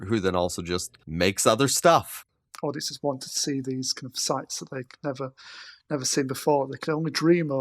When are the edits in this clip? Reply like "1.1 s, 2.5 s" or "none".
1.0 s, 2.1 s